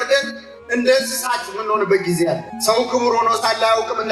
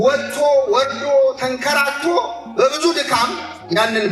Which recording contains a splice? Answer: first; 1 cut; at 2.5 s

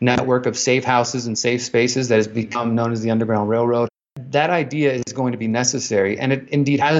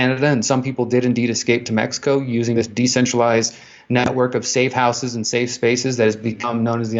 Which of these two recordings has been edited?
first; 1 cut; at 4.1 s

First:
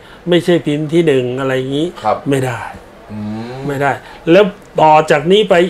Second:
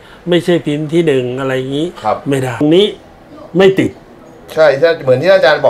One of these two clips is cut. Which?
second; 1 cut; at 2.6 s

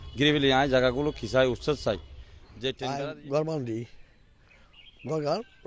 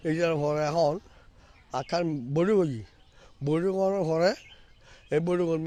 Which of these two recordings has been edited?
first; 1 cut; at 2.8 s

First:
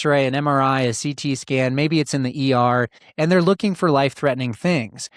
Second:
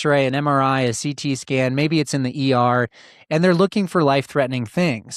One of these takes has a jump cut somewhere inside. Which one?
first; 1 cut; at 3.0 s

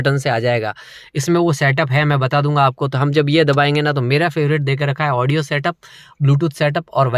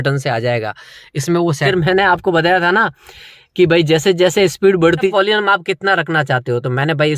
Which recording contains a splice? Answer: second; 2 cuts; at 1.6 s, 5.1 s

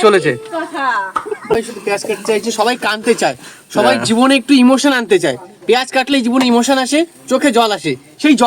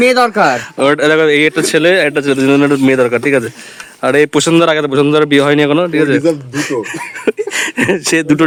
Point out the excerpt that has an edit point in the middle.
first; 1 cut; at 1.5 s

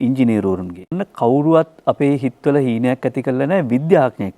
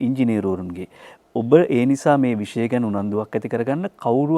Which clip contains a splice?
first; 1 cut; at 1.0 s

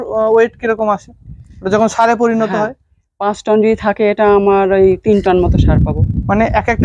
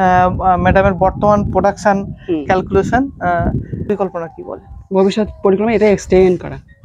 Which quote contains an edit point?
second; 1 cut; at 3.9 s

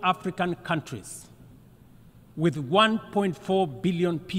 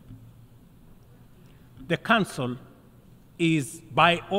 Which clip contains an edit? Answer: second; 1 cut; at 1.3 s

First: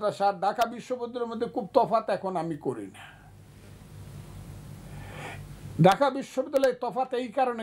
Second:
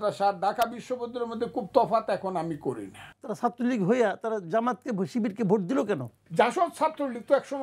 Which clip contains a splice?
second; 2 cuts; at 3.2 s, 6.2 s

